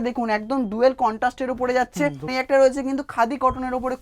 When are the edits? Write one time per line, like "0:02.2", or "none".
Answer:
0:02.3